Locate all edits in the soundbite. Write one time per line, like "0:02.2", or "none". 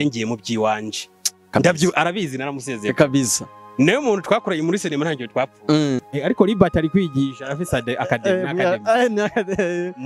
0:06.1